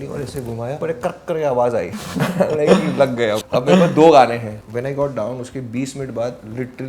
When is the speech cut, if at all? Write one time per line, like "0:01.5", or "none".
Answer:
0:00.8
0:02.0
0:03.4
0:04.6